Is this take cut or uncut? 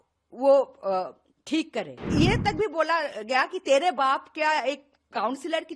cut